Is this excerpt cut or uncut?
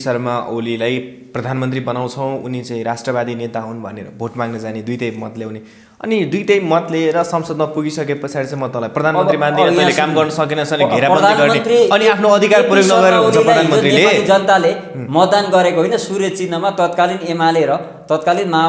uncut